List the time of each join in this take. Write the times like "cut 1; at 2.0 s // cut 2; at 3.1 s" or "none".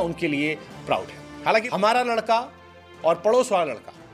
cut 1; at 1.7 s